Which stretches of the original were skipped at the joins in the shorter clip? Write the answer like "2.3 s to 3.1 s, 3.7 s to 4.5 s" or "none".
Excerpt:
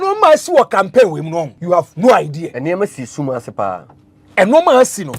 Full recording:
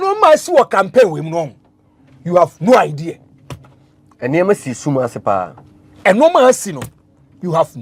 1.5 s to 2.2 s, 3.1 s to 4.2 s